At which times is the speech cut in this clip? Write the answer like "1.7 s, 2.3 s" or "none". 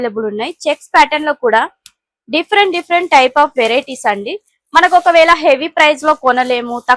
none